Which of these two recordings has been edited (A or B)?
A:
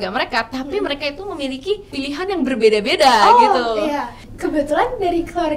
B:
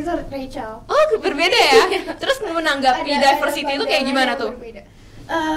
A